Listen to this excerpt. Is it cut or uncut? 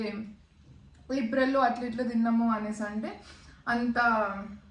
uncut